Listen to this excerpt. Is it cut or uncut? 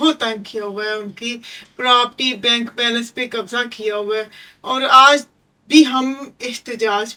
uncut